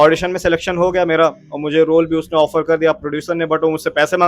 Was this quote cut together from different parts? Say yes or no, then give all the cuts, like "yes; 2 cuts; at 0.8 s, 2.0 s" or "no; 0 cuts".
no; 0 cuts